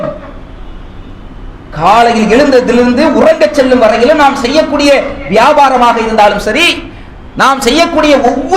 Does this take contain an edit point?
no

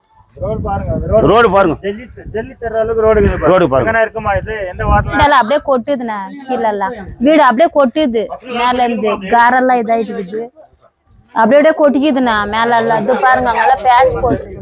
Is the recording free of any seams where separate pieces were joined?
no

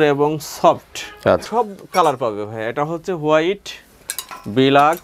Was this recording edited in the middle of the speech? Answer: yes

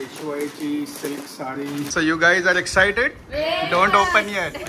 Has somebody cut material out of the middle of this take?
yes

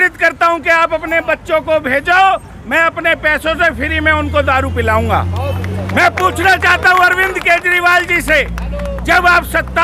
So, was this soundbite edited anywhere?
no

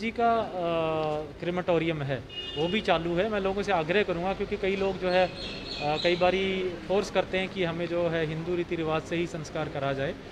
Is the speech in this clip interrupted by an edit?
no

